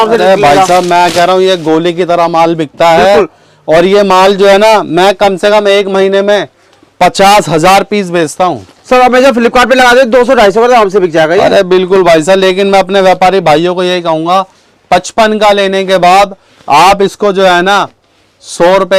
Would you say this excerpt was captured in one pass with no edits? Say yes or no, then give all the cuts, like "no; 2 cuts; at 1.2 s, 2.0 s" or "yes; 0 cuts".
yes; 0 cuts